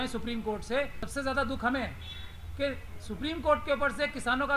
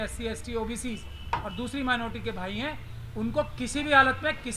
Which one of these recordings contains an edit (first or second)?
first